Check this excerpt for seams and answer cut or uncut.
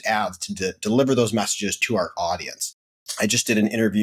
cut